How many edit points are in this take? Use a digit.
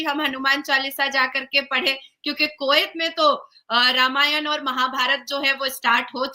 0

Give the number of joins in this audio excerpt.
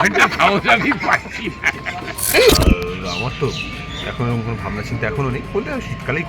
1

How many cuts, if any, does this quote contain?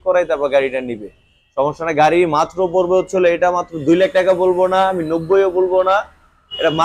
0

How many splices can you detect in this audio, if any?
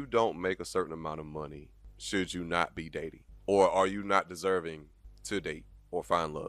0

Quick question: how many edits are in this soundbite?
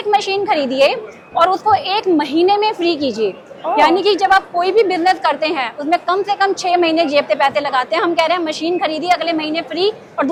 0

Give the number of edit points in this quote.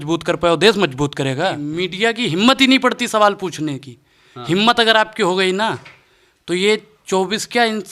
1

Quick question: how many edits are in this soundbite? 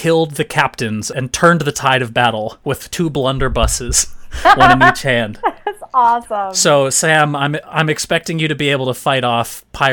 2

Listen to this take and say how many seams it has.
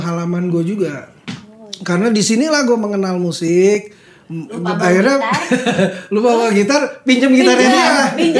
1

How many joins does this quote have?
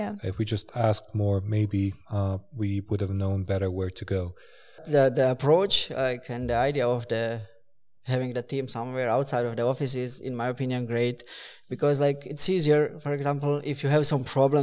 1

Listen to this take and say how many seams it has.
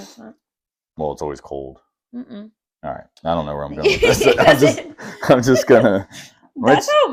0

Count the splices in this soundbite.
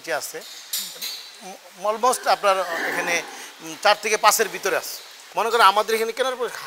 1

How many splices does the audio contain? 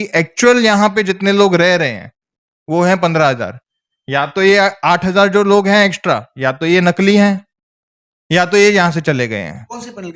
0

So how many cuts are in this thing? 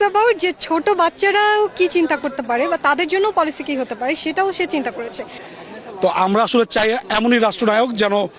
1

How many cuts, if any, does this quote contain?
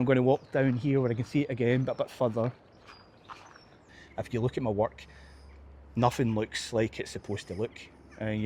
1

